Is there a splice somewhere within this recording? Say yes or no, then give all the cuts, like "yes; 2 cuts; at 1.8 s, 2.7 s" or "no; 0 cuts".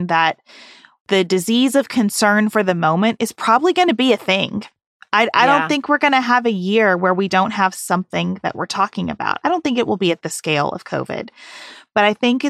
no; 0 cuts